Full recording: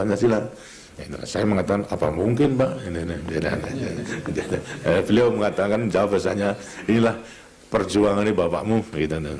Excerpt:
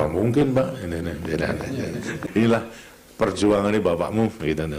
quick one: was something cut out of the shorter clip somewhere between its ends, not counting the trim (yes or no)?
yes